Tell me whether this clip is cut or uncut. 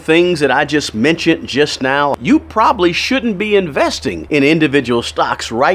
cut